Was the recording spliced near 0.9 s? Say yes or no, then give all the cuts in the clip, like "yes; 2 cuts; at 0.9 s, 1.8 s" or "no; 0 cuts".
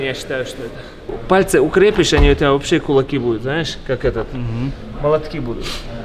yes; 1 cut; at 0.9 s